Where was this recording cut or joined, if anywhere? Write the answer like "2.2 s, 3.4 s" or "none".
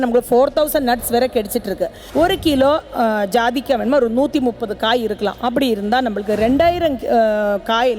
2.0 s